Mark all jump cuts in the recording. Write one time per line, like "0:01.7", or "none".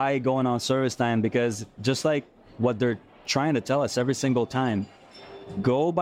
none